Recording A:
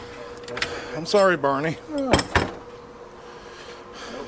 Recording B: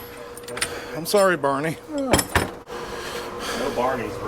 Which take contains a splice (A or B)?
B